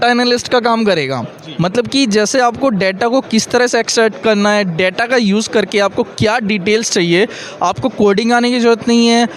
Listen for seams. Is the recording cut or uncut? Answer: uncut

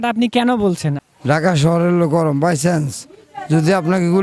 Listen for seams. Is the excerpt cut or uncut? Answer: cut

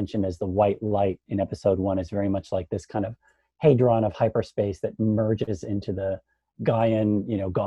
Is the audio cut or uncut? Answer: uncut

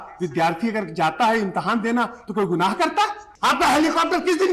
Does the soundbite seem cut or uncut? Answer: cut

